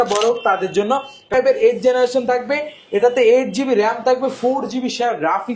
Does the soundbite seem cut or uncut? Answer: cut